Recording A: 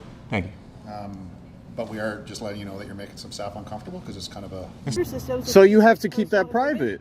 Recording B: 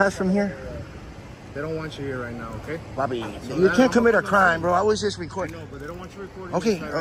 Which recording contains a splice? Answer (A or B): A